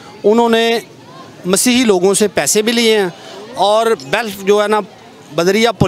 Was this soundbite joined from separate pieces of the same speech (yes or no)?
no